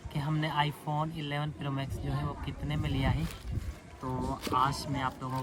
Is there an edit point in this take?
no; 0 cuts

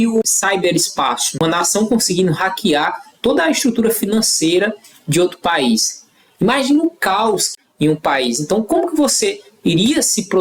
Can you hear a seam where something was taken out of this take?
no; 0 cuts

